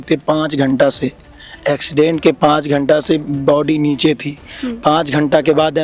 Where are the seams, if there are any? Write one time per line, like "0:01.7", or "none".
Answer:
none

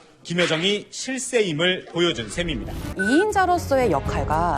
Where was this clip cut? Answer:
0:02.8

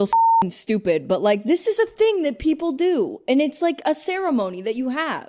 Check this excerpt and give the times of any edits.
none

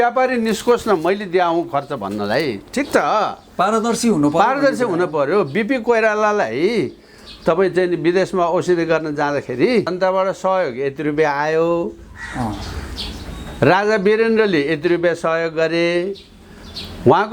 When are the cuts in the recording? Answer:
0:09.9

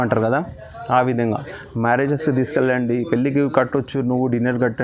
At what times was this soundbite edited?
none

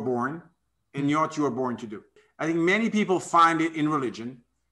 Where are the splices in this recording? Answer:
0:02.2

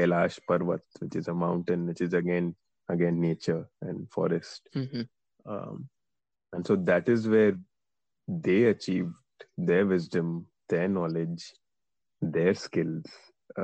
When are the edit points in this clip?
none

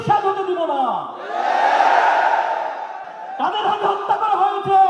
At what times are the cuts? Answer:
0:03.1

